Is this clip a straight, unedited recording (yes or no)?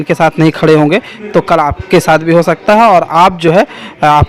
yes